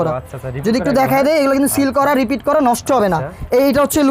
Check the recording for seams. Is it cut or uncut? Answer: uncut